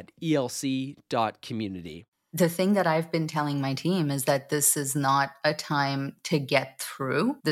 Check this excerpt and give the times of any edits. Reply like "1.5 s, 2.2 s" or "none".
2.1 s